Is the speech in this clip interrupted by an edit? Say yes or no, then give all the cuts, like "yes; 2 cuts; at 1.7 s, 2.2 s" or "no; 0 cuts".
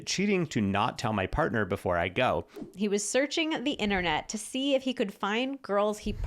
yes; 1 cut; at 2.7 s